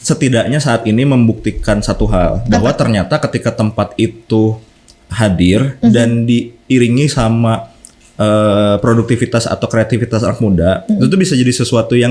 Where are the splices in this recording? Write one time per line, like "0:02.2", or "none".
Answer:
none